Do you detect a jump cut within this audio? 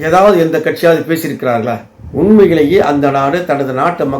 yes; 1 cut; at 1.9 s

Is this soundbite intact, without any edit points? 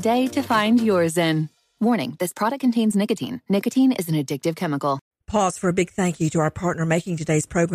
no; 1 cut; at 5.0 s

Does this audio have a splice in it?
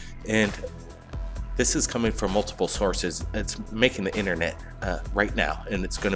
yes; 1 cut; at 3.2 s

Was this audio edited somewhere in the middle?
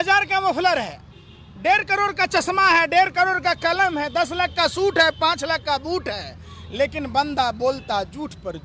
no; 0 cuts

